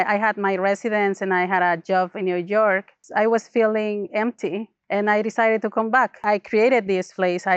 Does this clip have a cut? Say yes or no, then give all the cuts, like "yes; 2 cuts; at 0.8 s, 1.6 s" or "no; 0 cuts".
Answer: yes; 3 cuts; at 3.0 s, 4.7 s, 6.2 s